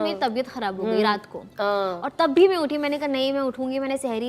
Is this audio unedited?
yes; 0 cuts

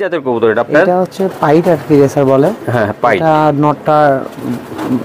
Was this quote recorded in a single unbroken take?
yes; 0 cuts

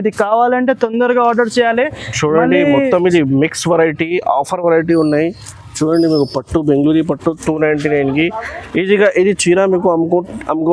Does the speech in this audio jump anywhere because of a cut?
no; 0 cuts

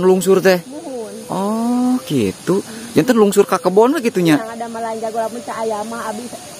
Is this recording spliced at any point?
no; 0 cuts

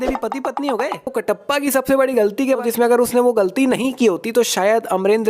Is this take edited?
yes; 2 cuts; at 1.2 s, 2.6 s

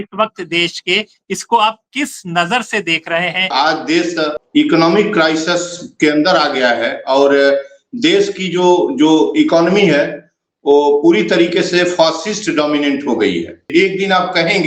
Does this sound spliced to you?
yes; 2 cuts; at 4.0 s, 13.7 s

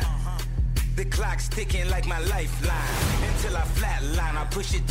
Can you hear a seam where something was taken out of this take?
no; 0 cuts

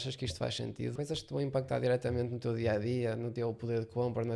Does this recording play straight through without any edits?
no; 2 cuts; at 0.9 s, 3.3 s

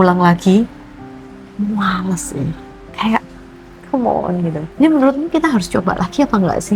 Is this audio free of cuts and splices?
no; 1 cut; at 4.6 s

